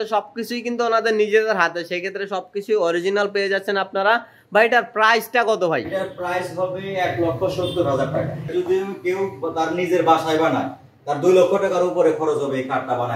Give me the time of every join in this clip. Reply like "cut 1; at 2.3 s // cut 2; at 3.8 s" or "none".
none